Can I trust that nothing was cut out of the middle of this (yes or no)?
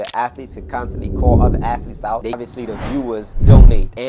no